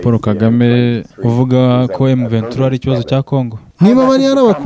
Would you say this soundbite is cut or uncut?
cut